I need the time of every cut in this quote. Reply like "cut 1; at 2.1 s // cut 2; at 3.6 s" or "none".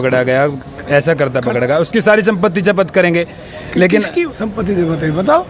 cut 1; at 4.2 s